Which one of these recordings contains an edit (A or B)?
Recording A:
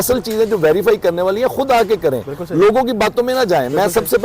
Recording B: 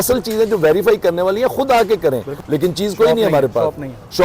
B